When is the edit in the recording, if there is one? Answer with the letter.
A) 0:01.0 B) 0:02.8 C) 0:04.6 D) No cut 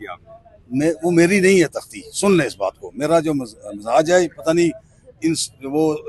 D